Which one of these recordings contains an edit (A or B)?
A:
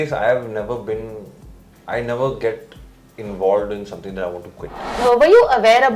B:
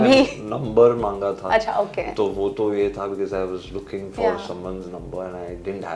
A